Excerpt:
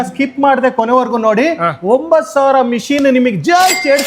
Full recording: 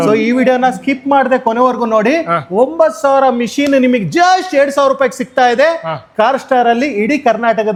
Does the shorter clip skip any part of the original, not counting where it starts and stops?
no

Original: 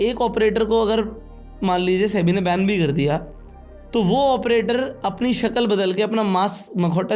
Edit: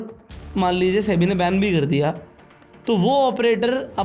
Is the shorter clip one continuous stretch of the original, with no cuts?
yes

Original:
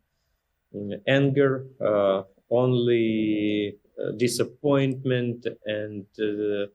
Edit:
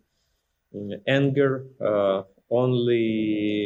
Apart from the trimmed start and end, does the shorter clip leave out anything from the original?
no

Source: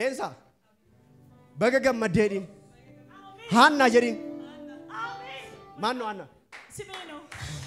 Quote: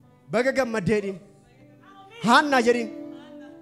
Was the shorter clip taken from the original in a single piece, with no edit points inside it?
yes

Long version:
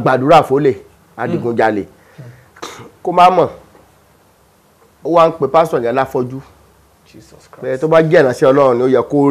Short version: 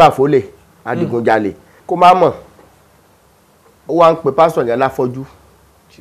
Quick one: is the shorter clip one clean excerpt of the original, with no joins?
no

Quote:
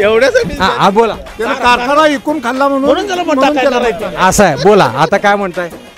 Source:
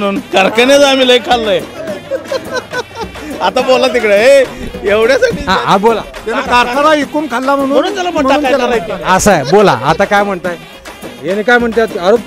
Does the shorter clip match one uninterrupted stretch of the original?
yes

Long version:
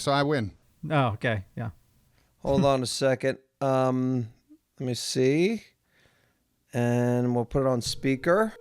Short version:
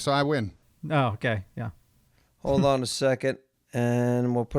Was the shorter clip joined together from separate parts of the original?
yes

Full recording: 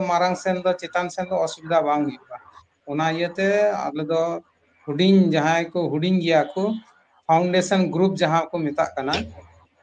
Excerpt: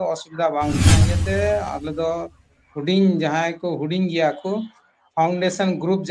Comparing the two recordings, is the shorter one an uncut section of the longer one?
no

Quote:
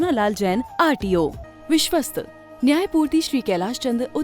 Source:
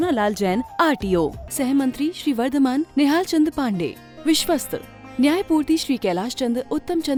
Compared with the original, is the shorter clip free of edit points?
no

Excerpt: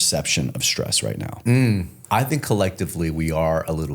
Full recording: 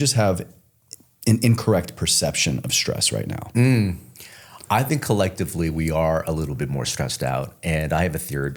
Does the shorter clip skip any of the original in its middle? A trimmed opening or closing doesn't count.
yes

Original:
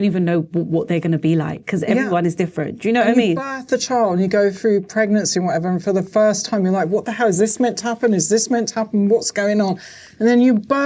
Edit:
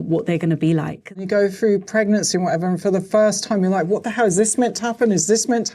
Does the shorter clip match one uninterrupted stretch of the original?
no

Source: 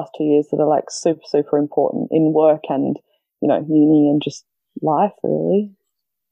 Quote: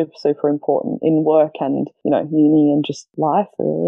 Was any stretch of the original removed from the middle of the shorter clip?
yes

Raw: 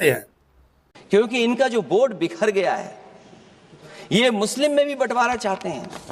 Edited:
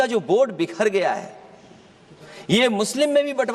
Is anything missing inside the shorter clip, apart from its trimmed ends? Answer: no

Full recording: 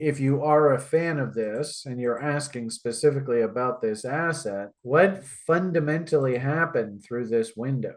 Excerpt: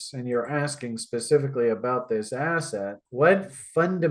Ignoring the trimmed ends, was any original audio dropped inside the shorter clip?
no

